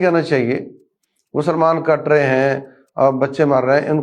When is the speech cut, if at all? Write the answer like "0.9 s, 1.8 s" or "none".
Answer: none

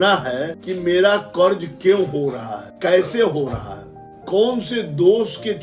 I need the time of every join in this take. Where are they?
none

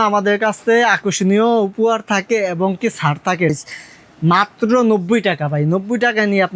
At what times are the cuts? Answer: 3.5 s

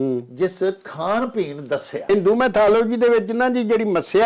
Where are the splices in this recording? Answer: 2.1 s

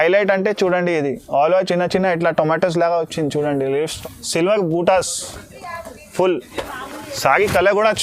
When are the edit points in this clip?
4.0 s

